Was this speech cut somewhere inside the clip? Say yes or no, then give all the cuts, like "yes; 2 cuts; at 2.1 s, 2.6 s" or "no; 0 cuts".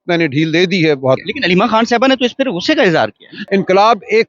yes; 2 cuts; at 1.3 s, 3.3 s